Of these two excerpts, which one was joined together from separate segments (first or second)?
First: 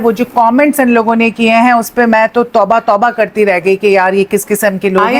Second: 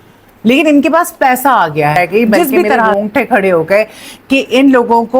second